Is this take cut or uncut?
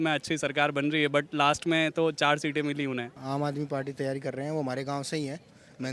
cut